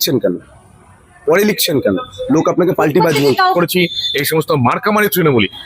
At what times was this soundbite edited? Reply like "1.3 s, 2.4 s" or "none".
3.5 s